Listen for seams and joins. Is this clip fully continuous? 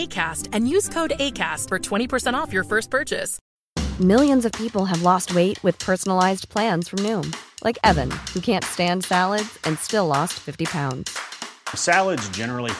no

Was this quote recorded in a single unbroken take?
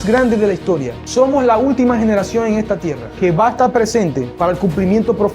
no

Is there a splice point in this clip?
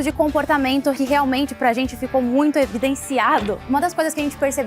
yes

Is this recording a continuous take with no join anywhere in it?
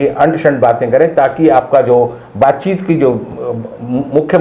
yes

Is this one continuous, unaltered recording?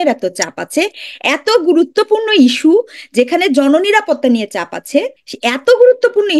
no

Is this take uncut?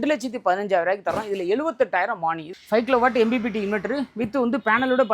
no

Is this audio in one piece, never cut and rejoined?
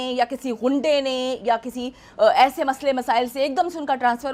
yes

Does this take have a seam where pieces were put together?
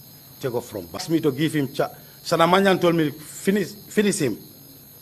no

